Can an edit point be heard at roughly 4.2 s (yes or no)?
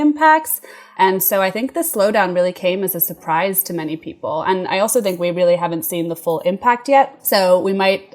no